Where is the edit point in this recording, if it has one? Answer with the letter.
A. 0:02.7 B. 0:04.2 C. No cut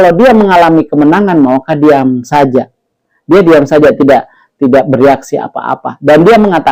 C